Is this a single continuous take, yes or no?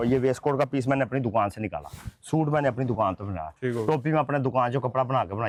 yes